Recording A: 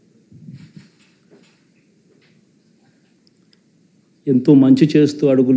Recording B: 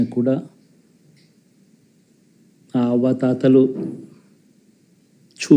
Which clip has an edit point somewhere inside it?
A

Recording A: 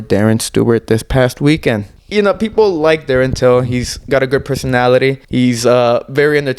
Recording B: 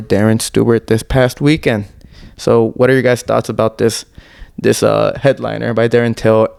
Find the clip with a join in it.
A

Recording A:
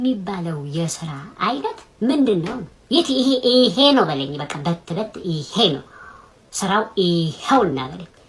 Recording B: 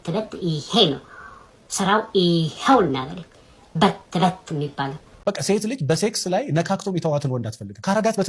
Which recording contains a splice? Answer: B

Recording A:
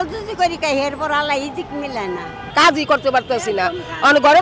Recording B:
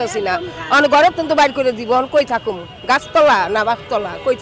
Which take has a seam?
A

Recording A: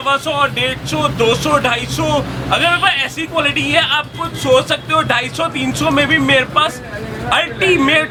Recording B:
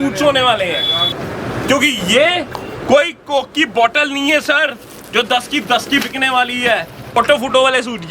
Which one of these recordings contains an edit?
B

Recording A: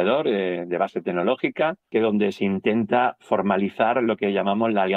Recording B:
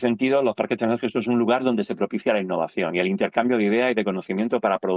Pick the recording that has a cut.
A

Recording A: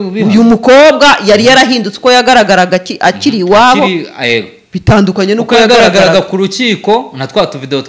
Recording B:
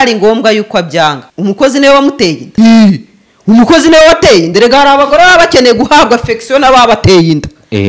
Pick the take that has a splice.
B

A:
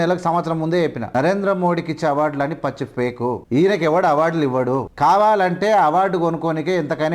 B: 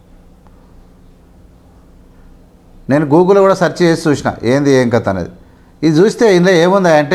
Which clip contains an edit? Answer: A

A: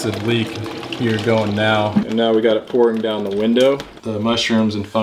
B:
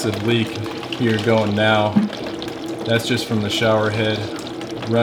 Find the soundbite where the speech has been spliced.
A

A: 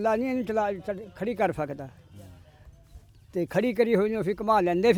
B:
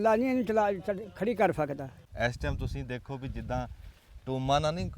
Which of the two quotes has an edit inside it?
B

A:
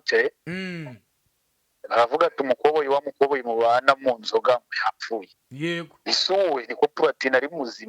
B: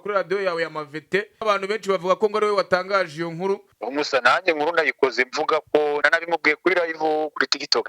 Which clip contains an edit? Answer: B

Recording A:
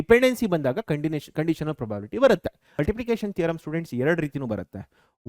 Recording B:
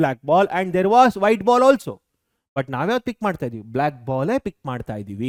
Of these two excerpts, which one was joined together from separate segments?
A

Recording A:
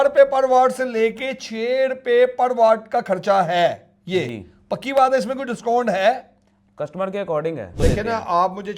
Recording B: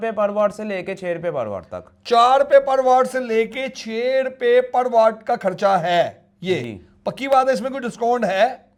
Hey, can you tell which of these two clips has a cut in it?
A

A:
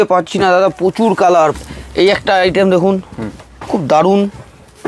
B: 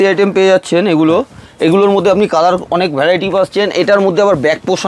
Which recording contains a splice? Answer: A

